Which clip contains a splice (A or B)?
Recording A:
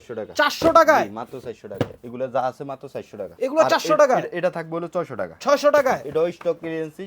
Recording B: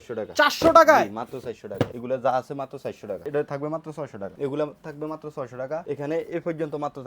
B